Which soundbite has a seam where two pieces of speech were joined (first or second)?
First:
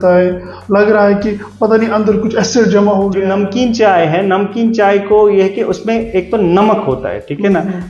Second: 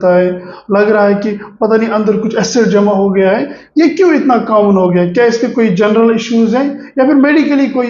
first